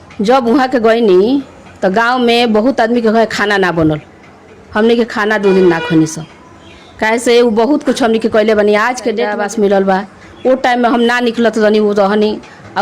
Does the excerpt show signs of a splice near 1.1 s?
no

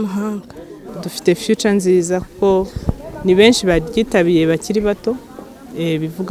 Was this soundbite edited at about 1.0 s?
yes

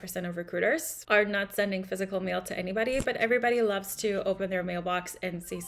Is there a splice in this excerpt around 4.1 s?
no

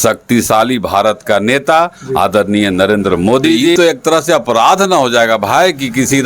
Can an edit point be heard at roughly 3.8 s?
yes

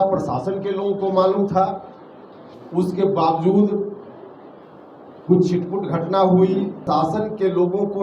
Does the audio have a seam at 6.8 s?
yes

